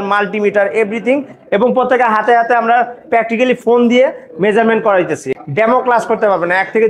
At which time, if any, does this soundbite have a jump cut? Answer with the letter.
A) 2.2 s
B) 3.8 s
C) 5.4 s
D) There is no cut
C